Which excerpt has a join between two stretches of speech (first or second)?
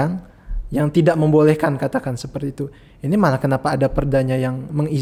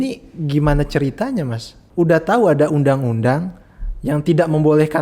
second